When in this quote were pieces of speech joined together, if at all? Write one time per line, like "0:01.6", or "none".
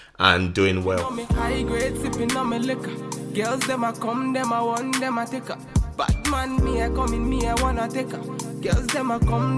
0:01.0

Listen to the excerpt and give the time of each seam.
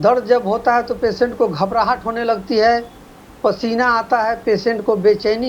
none

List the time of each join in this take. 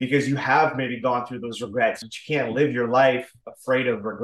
0:02.1

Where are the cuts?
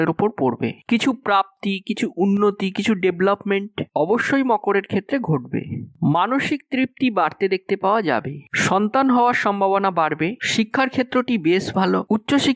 0:10.4

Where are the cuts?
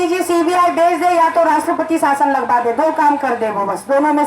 none

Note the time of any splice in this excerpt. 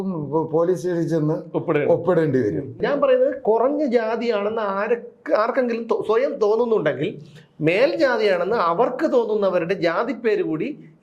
0:02.8

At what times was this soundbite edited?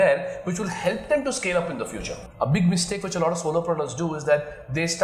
0:02.2

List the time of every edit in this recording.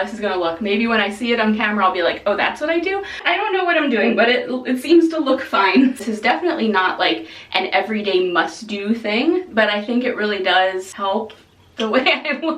0:03.1
0:06.0
0:10.9

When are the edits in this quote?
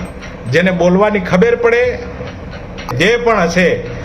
0:02.9

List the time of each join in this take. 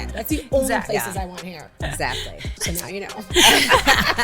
0:02.6

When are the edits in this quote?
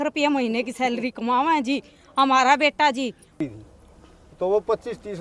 0:03.4

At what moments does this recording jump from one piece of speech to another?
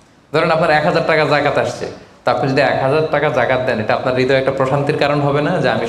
none

